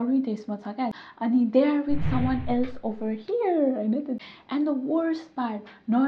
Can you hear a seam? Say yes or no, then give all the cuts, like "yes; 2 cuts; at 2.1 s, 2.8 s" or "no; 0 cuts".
yes; 2 cuts; at 1.0 s, 4.2 s